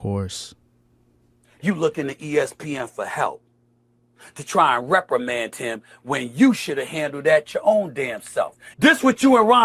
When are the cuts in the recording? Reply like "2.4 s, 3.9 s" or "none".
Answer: 8.6 s